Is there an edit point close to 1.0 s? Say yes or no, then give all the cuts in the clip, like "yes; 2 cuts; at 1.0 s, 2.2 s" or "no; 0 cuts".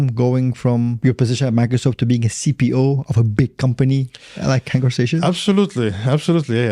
yes; 1 cut; at 1.0 s